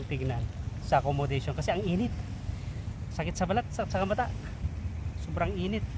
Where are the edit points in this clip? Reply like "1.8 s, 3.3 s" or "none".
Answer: none

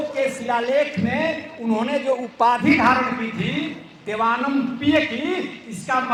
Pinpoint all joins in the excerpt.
none

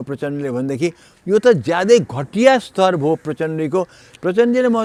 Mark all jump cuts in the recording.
none

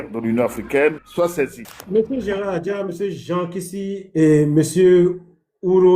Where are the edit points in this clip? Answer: 1.6 s

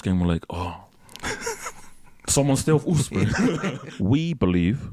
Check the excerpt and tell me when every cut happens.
3.8 s

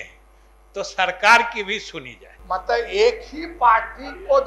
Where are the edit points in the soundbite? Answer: 2.4 s

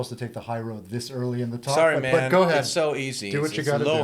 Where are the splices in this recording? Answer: none

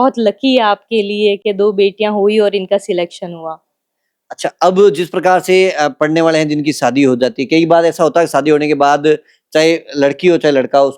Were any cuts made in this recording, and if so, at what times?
none

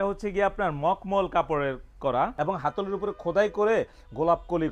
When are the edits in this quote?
2.3 s

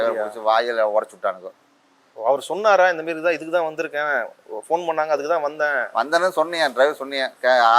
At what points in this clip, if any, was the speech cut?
none

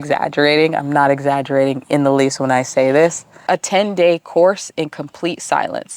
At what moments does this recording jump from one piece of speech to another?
3.4 s

